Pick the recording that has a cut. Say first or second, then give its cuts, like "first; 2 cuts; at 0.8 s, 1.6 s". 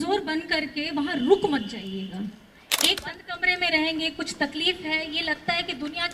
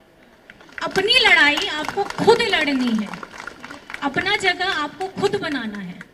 first; 1 cut; at 3.0 s